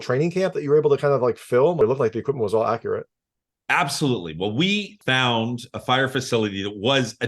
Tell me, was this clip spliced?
yes; 2 cuts; at 1.8 s, 4.9 s

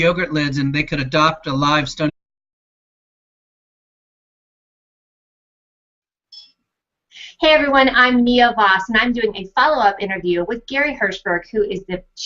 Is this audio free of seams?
yes; 0 cuts

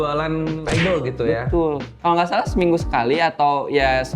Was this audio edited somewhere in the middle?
yes; 1 cut; at 1.9 s

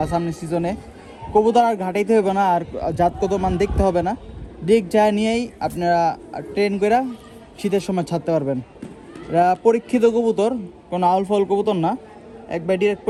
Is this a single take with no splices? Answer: yes; 0 cuts

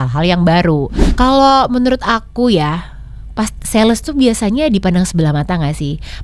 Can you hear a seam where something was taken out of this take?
yes; 1 cut; at 1.0 s

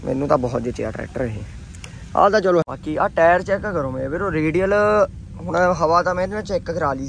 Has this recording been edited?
yes; 1 cut; at 2.6 s

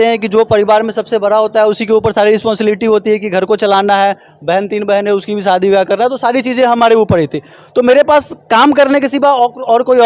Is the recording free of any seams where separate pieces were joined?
yes; 0 cuts

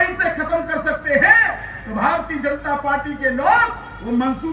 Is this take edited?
no; 0 cuts

